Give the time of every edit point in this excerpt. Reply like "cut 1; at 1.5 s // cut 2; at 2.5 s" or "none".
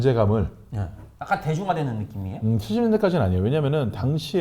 cut 1; at 1.1 s